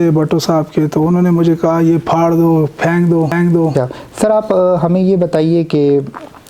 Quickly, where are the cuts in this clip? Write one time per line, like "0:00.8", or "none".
0:03.7